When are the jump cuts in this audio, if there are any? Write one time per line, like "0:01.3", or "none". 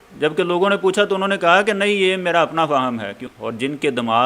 0:03.2